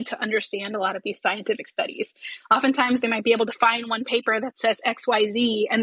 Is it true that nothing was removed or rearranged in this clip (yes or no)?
yes